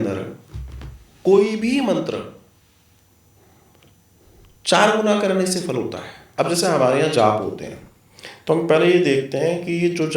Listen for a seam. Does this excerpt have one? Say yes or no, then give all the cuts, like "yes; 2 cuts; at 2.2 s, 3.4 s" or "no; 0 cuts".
yes; 1 cut; at 6.2 s